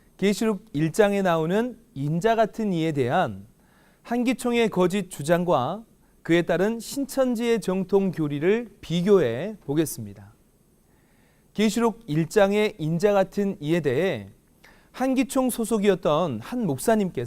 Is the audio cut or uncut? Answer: cut